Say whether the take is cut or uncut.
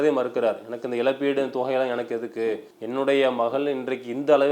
cut